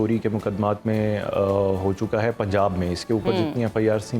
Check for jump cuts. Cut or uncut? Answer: uncut